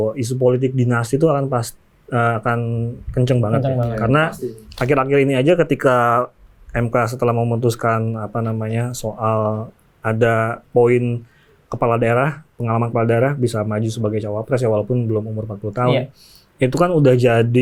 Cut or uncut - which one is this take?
uncut